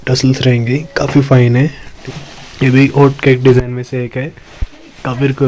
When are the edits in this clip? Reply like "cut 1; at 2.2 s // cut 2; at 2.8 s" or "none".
cut 1; at 1.9 s